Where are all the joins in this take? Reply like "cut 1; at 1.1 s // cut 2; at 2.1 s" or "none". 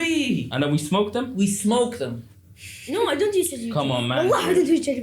cut 1; at 2.2 s